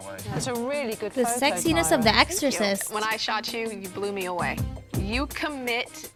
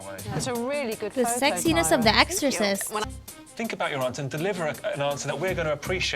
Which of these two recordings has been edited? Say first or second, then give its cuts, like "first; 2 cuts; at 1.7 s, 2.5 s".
second; 1 cut; at 3.0 s